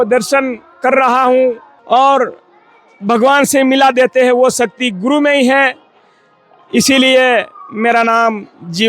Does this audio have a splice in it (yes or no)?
yes